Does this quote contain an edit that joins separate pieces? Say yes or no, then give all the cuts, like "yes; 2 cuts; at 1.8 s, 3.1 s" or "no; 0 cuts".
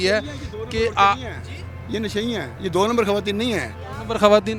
no; 0 cuts